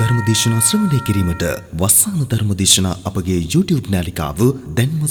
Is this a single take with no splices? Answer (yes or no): yes